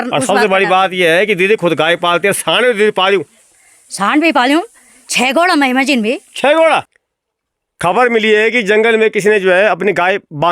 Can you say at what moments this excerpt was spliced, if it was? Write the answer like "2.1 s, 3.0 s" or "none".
6.9 s

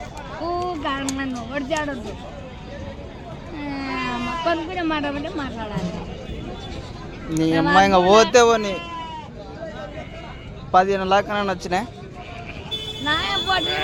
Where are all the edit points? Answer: none

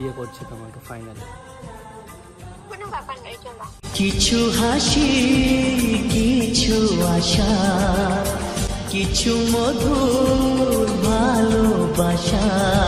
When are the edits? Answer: none

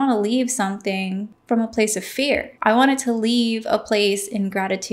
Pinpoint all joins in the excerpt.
1.3 s, 2.5 s

